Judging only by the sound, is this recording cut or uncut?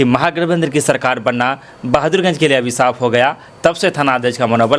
uncut